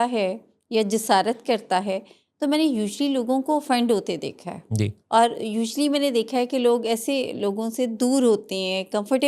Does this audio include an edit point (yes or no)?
no